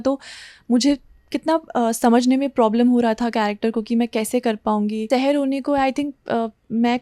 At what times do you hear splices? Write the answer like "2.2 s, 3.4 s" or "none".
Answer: 5.0 s